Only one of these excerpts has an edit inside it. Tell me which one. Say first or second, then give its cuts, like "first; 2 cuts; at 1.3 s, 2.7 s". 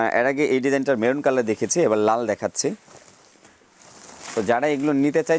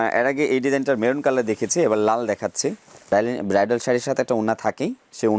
second; 1 cut; at 2.9 s